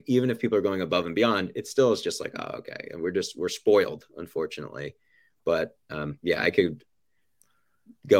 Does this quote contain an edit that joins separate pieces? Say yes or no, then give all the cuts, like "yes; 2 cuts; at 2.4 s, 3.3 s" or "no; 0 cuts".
no; 0 cuts